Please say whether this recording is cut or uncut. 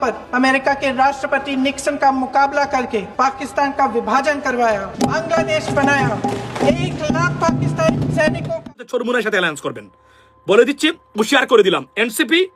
cut